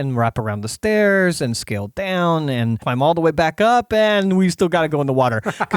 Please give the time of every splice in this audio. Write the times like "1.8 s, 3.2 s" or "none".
2.8 s